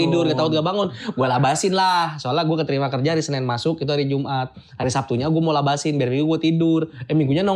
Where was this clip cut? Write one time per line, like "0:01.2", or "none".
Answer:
none